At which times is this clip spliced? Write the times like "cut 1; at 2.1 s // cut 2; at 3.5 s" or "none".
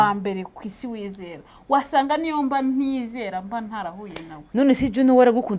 none

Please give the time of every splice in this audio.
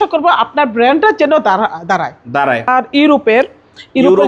cut 1; at 2.7 s

